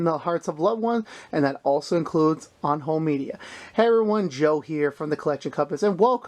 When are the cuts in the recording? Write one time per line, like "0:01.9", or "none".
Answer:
none